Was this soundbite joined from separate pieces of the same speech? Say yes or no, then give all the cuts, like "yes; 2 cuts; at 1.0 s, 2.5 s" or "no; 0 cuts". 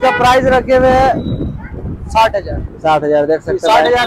no; 0 cuts